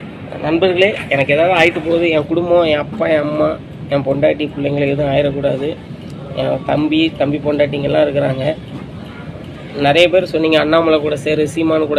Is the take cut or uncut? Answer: uncut